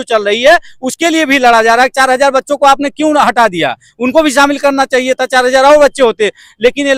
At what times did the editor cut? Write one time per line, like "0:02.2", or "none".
none